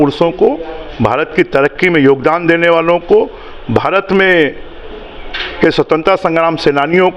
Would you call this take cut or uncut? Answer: uncut